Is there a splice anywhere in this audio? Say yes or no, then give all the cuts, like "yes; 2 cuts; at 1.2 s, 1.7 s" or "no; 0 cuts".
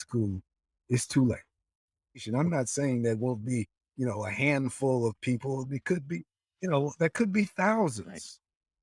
yes; 1 cut; at 2.2 s